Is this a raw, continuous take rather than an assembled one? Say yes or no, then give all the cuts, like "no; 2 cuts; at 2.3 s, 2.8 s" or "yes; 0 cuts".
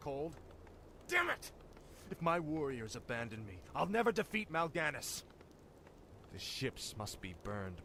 yes; 0 cuts